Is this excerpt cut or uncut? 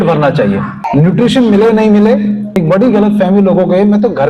cut